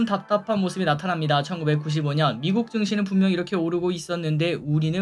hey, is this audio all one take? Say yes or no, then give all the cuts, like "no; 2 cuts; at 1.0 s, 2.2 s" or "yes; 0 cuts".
yes; 0 cuts